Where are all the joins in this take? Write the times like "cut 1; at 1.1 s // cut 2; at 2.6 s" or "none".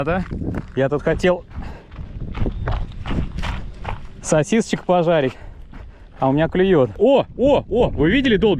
cut 1; at 6.9 s